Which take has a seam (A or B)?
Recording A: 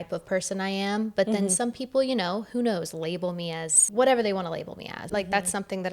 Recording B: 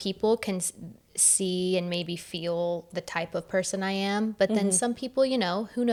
A